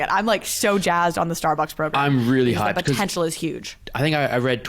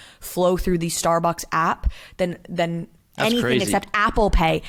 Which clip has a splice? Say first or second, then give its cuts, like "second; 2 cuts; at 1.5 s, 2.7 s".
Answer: first; 2 cuts; at 1.9 s, 3.3 s